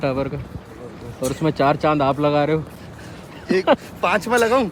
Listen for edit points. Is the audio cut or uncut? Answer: uncut